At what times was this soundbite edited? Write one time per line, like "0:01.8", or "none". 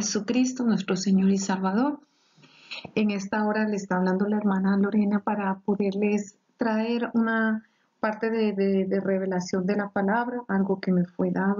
0:09.4